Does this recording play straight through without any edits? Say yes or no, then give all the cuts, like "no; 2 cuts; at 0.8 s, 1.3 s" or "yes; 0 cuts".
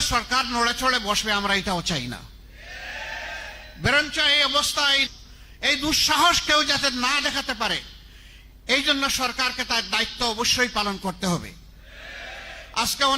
no; 1 cut; at 5.1 s